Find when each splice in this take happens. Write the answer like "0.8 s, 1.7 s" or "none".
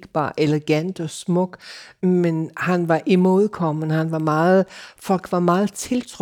1.9 s